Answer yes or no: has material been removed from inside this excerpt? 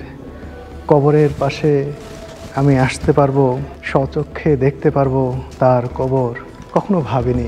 yes